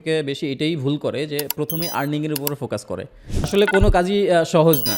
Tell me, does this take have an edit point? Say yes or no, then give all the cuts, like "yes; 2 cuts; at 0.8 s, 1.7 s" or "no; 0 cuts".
yes; 1 cut; at 3.5 s